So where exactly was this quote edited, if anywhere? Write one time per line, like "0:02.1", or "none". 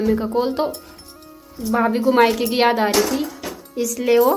none